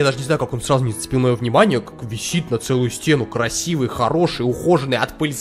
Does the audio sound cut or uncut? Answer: uncut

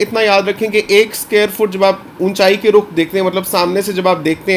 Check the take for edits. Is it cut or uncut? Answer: uncut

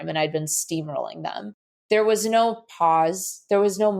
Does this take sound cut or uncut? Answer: cut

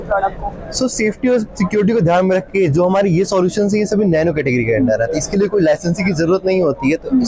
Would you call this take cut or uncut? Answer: uncut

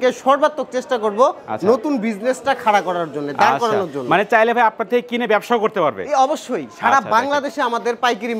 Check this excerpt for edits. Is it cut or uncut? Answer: uncut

